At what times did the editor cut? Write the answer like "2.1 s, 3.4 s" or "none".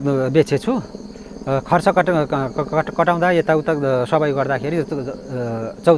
none